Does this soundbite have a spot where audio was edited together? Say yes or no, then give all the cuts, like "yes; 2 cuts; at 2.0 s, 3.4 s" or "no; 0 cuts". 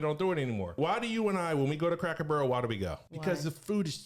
yes; 2 cuts; at 0.8 s, 3.1 s